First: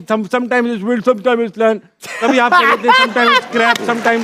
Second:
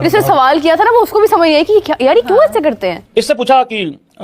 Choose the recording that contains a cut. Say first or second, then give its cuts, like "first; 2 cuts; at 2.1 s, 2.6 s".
second; 1 cut; at 3.0 s